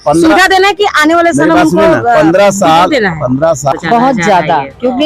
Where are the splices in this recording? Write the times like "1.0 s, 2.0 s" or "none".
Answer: 3.7 s